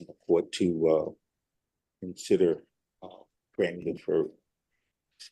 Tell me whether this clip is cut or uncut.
cut